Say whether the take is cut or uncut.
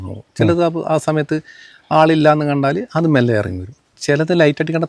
cut